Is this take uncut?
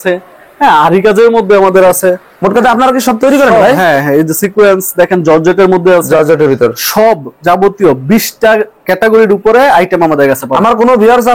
yes; 0 cuts

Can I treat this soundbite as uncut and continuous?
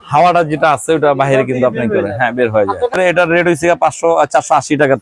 no; 1 cut; at 2.9 s

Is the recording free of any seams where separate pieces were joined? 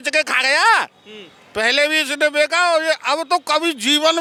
yes; 0 cuts

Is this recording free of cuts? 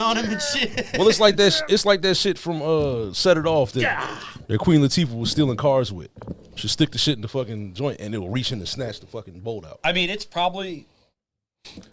yes; 0 cuts

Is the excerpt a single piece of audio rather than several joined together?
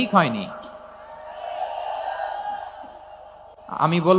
yes; 0 cuts

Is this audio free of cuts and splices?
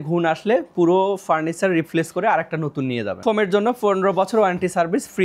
no; 1 cut; at 3.2 s

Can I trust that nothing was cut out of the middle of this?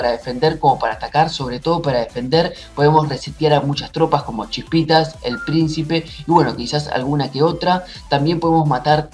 yes; 0 cuts

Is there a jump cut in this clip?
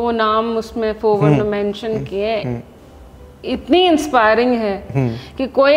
no; 0 cuts

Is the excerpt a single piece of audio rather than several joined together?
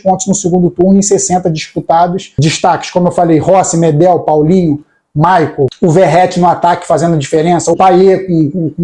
no; 3 cuts; at 2.3 s, 5.7 s, 7.8 s

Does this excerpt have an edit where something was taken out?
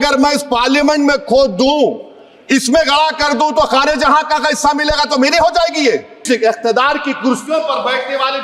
yes; 1 cut; at 6.3 s

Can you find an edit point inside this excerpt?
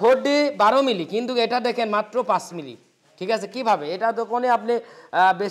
no; 0 cuts

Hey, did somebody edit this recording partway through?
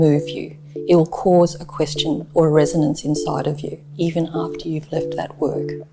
yes; 1 cut; at 3.9 s

